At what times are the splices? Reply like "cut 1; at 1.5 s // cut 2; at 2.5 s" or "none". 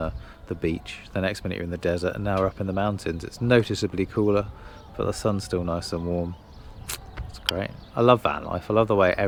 none